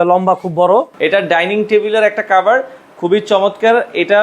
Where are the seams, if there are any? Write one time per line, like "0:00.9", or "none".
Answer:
0:00.9

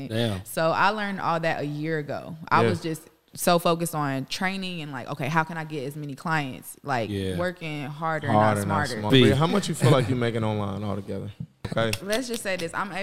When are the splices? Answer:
0:09.0
0:11.7

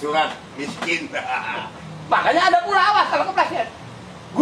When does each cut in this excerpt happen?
0:01.7

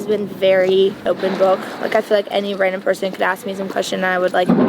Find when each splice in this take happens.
0:01.0

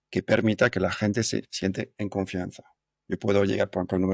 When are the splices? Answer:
none

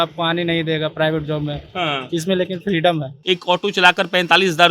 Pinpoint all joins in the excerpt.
0:03.1

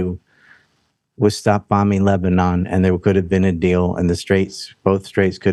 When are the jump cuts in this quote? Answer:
none

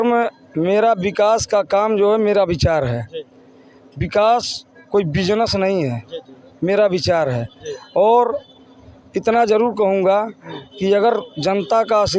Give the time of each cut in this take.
none

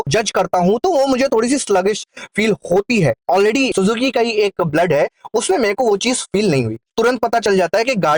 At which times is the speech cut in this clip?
0:03.2
0:06.9

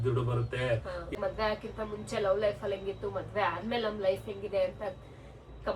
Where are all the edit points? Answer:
0:01.1

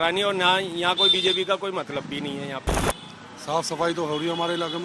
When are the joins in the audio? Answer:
0:02.8

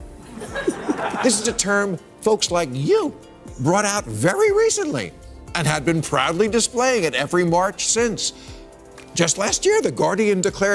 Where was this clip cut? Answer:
none

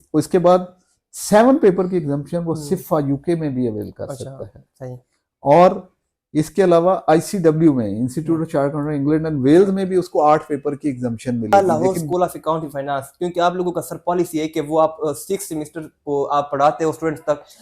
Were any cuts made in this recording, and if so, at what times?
0:11.5

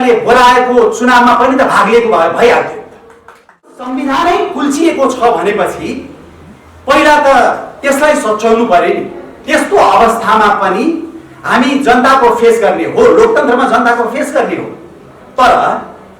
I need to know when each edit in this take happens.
0:03.8

